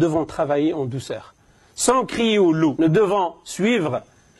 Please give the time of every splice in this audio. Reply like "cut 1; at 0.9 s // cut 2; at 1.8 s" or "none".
cut 1; at 2.7 s